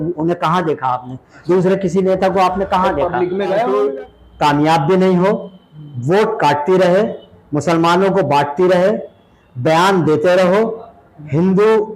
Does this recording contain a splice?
yes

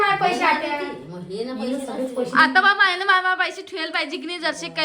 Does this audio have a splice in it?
no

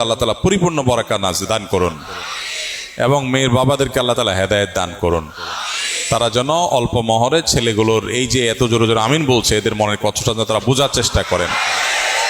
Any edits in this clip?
no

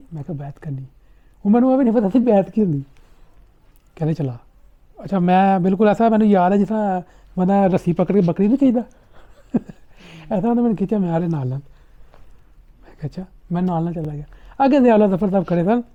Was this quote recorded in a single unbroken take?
yes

